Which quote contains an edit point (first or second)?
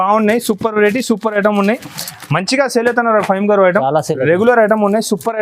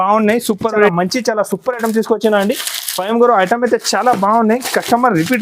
second